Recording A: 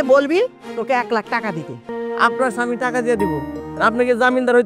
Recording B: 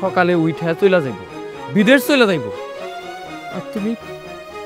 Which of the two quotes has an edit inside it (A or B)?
A